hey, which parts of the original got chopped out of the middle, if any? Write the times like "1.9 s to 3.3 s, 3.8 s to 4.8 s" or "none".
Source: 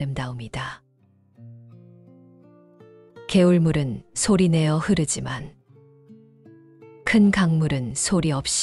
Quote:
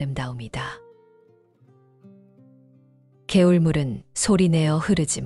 none

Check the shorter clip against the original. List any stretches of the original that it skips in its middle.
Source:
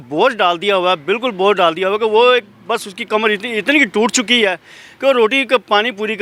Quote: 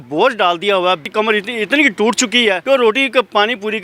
1.0 s to 3.0 s, 4.6 s to 5.0 s

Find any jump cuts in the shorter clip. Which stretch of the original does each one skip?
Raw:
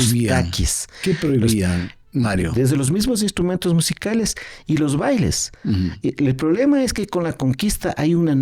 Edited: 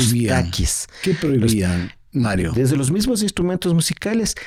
none

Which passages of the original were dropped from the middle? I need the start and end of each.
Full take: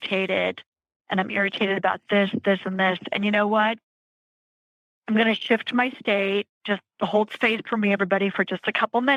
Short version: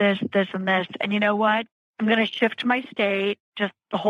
3.9 s to 4.9 s

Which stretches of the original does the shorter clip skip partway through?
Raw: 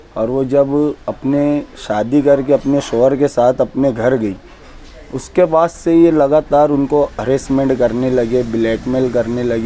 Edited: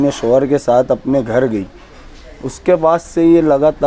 none

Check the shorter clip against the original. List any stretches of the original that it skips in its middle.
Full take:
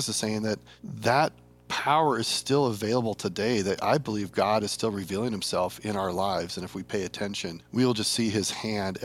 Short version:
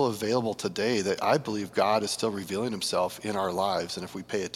none

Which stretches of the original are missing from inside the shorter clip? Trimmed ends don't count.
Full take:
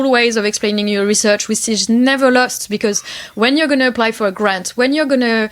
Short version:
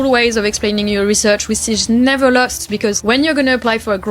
3.0 s to 3.3 s

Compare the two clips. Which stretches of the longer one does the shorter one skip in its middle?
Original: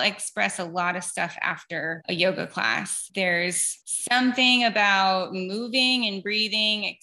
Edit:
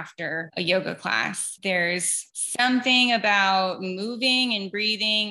none

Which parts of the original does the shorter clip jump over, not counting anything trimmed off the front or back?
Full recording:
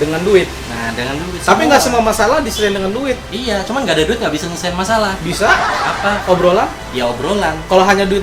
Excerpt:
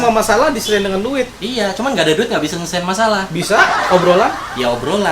5.8 s to 6.2 s

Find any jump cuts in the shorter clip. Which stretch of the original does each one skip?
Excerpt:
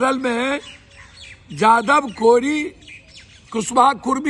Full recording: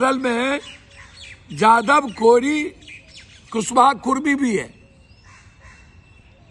none

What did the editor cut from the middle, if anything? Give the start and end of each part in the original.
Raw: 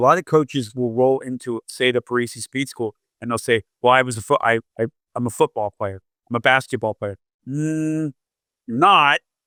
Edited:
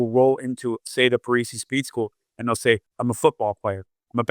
3.7 s to 5.0 s

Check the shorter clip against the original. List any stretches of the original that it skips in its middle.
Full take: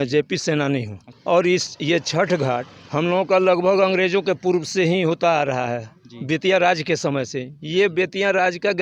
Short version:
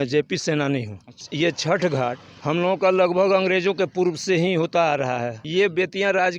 1.2 s to 1.7 s, 5.9 s to 7.6 s

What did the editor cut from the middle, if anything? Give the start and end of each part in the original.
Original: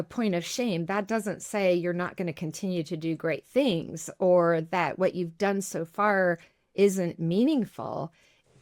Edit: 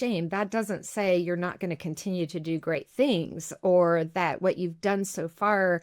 none

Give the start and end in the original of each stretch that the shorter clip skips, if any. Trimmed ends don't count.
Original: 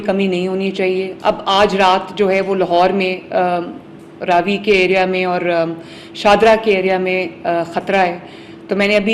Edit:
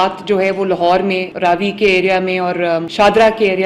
3.2 s to 4.2 s, 5.7 s to 6.1 s

